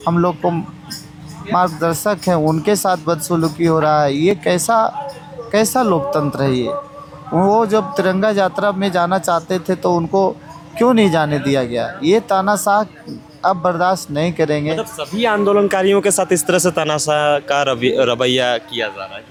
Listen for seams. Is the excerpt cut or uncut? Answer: uncut